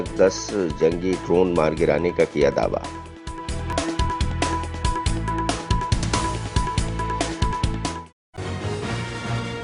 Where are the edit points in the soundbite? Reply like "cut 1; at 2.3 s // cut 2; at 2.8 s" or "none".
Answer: cut 1; at 8.4 s